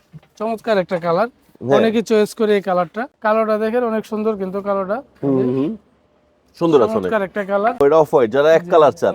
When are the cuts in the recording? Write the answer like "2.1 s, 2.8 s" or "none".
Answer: 3.1 s, 7.8 s